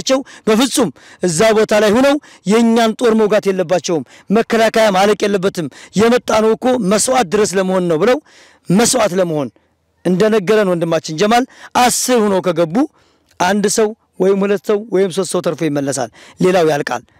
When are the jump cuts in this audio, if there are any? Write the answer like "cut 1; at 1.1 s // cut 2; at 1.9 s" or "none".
none